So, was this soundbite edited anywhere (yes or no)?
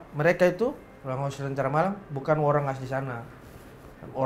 no